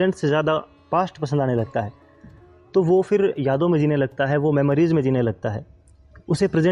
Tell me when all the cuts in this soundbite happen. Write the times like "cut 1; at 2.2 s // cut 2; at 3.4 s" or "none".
none